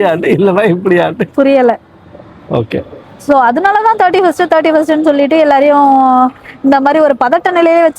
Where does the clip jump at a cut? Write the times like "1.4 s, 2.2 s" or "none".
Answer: 2.9 s